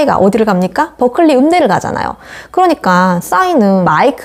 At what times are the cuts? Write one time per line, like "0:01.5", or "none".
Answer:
none